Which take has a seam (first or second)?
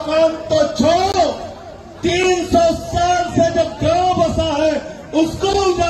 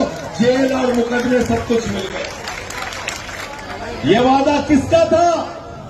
second